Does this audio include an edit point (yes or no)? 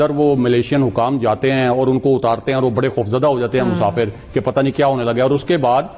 no